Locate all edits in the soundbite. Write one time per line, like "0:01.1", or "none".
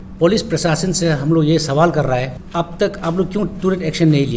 0:02.4